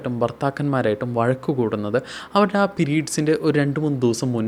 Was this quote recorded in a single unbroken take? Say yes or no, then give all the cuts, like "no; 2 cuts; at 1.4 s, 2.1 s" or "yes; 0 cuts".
yes; 0 cuts